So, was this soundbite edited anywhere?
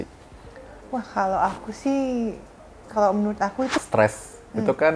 yes; 1 cut; at 3.8 s

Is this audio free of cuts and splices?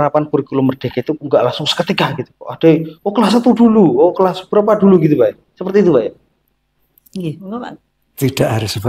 yes; 0 cuts

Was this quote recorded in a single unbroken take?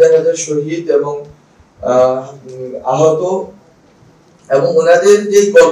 yes; 0 cuts

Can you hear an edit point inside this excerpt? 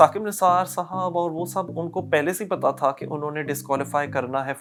no; 0 cuts

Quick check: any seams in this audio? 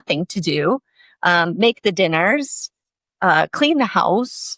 no; 0 cuts

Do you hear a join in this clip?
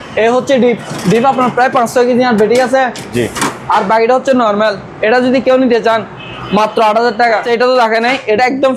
yes; 1 cut; at 7.4 s

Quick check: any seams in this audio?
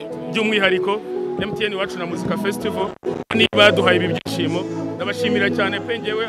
no; 0 cuts

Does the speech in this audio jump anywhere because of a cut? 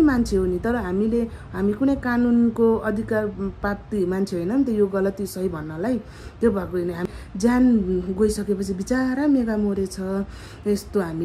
yes; 1 cut; at 7.0 s

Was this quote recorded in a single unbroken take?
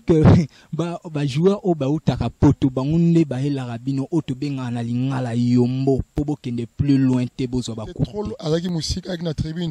no; 1 cut; at 8.1 s

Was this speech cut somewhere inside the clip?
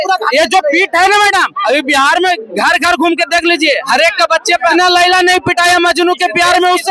yes; 1 cut; at 4.7 s

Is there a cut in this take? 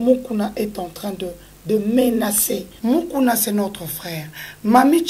yes; 1 cut; at 2.6 s

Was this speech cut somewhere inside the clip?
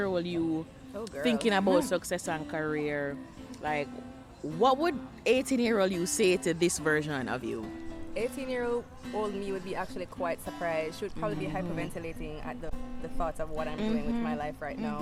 no; 0 cuts

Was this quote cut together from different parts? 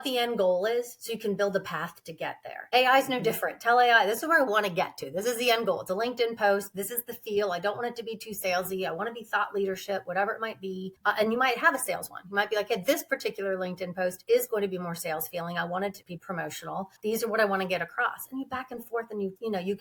no; 0 cuts

